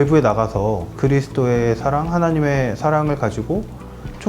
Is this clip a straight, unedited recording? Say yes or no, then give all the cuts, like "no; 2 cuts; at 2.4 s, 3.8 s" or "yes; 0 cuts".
no; 1 cut; at 0.9 s